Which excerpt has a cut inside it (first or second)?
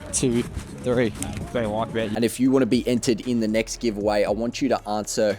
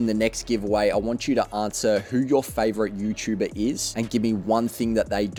first